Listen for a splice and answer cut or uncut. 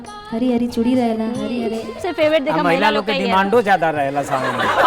cut